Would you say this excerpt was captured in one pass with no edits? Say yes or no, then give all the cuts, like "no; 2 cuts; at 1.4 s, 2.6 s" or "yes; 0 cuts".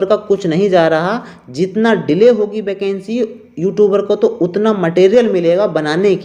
yes; 0 cuts